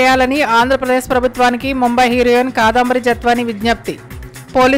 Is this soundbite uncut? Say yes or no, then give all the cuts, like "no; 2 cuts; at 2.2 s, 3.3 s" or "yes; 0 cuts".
yes; 0 cuts